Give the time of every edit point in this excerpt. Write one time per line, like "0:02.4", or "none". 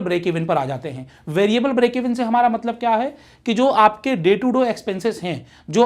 none